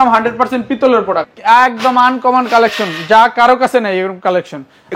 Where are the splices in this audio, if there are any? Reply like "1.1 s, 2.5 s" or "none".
1.3 s